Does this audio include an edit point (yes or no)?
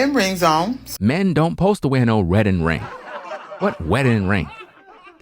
no